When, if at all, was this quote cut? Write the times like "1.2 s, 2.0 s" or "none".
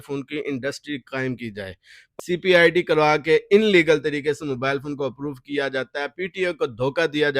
2.0 s